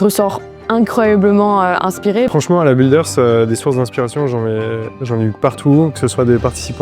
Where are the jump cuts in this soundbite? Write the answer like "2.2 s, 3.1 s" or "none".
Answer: 2.3 s